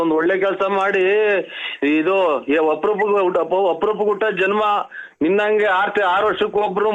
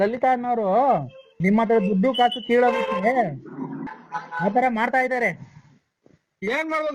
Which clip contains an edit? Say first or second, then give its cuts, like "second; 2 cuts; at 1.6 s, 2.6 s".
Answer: second; 2 cuts; at 1.3 s, 3.9 s